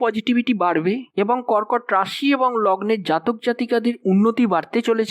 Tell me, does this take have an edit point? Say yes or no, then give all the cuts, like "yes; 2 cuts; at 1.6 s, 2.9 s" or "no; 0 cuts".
no; 0 cuts